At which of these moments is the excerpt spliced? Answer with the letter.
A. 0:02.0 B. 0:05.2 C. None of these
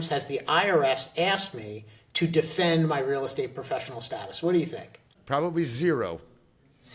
B